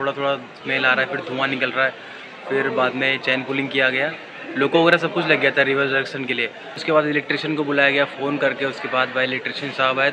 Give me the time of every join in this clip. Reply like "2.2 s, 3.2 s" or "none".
none